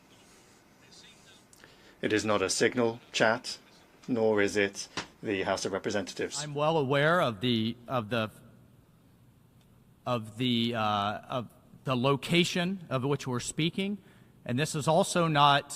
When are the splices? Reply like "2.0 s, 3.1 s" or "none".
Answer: 6.5 s